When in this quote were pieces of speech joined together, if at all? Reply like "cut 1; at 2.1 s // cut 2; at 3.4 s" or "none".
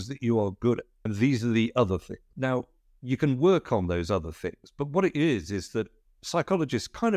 cut 1; at 1.0 s // cut 2; at 2.2 s